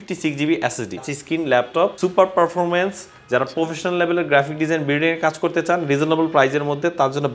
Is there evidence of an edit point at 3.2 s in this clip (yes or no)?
no